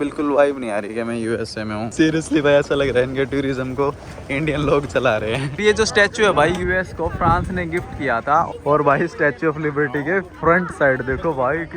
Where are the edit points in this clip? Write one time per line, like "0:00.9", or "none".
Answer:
0:01.9
0:05.6
0:08.5